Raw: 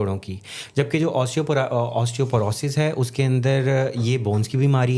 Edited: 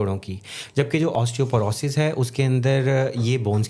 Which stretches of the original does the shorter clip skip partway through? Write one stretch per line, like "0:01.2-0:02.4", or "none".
0:01.1-0:01.9